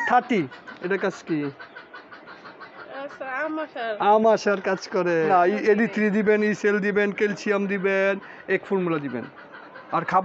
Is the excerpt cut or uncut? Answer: cut